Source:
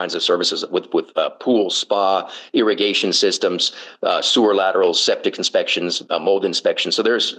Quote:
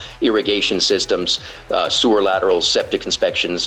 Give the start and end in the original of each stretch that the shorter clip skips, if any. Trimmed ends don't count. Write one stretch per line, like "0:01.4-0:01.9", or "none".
none